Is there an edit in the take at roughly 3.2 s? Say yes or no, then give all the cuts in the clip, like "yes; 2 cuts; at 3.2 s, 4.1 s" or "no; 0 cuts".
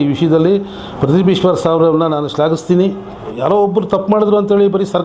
yes; 1 cut; at 3.2 s